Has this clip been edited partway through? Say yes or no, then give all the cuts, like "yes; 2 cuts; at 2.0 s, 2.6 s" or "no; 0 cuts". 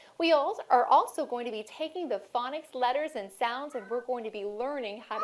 yes; 1 cut; at 4.2 s